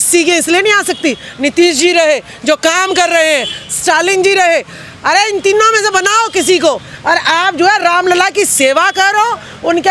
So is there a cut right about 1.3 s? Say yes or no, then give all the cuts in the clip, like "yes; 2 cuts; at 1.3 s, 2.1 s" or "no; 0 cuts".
no; 0 cuts